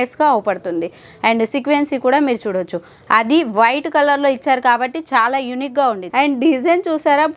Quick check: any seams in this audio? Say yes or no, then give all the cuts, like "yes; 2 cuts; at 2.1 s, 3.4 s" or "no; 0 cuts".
yes; 1 cut; at 6.0 s